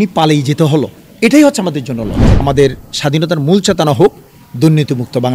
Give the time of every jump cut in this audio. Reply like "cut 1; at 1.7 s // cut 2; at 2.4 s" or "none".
cut 1; at 2.3 s